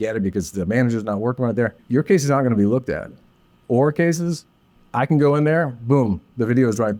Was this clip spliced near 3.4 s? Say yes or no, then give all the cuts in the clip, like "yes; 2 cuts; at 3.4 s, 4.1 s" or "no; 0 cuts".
no; 1 cut; at 1.8 s